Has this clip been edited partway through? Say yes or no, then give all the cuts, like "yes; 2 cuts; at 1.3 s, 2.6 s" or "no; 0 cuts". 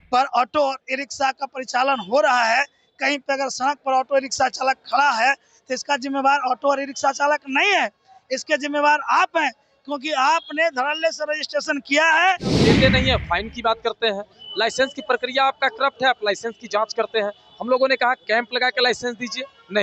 yes; 1 cut; at 12.6 s